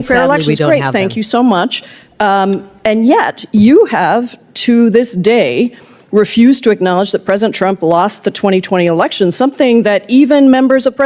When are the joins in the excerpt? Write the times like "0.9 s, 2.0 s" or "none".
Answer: none